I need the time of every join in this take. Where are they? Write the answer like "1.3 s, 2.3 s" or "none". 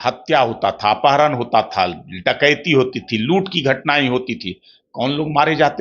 none